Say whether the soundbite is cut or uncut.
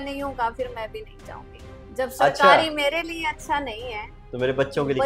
uncut